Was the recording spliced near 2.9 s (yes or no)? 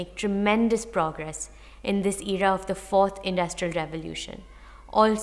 no